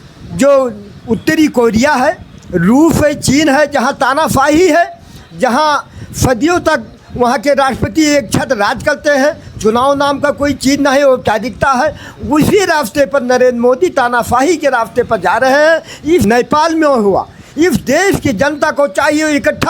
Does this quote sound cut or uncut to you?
cut